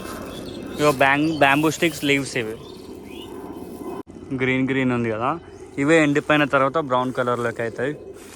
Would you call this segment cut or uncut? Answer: cut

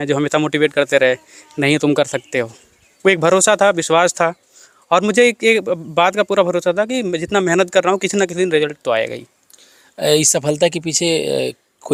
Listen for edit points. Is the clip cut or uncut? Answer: uncut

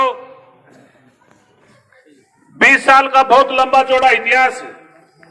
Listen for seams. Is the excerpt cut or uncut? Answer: cut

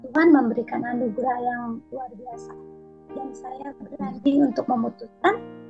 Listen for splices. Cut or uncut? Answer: uncut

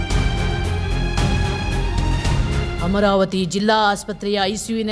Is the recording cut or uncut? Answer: cut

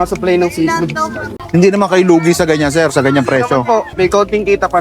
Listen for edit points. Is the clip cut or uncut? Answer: cut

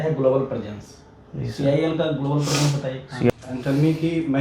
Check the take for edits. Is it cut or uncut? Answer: cut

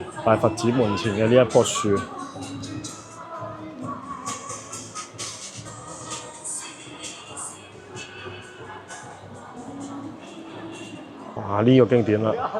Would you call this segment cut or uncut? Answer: cut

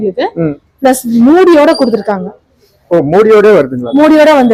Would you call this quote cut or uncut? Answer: uncut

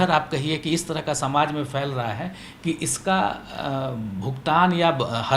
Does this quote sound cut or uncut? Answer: uncut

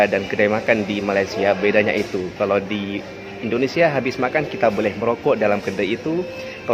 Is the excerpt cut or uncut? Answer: uncut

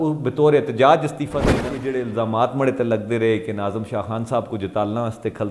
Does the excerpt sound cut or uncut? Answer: cut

